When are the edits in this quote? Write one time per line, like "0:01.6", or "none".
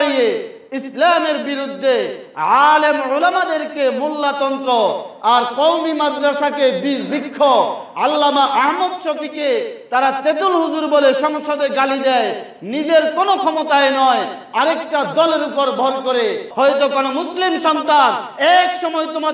0:16.5